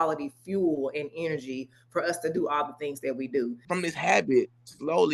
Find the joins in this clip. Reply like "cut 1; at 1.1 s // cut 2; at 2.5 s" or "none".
cut 1; at 3.6 s